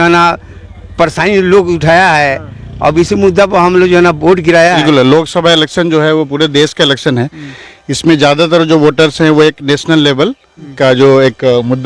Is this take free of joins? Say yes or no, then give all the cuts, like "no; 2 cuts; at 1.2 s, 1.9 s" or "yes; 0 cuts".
no; 1 cut; at 4.8 s